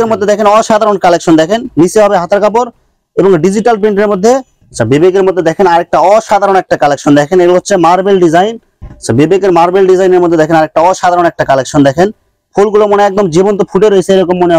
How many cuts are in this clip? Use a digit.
2